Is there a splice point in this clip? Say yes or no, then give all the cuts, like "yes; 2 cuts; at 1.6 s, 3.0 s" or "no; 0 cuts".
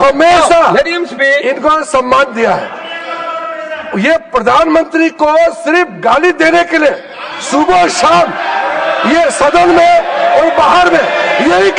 no; 0 cuts